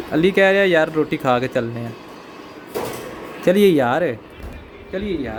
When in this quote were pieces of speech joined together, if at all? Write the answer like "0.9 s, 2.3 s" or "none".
none